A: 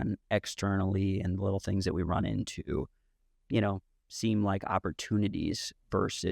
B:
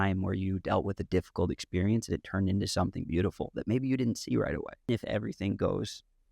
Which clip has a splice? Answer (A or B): B